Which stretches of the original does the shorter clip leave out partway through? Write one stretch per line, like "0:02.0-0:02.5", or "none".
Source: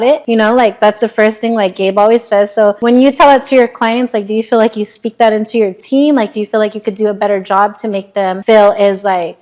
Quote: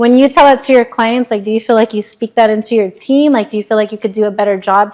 none